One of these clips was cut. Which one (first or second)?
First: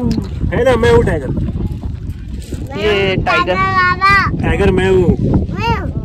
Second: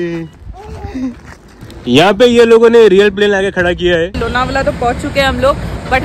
second